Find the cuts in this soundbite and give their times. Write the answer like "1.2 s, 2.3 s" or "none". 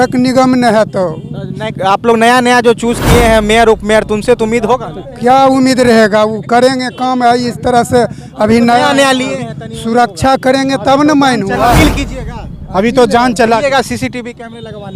none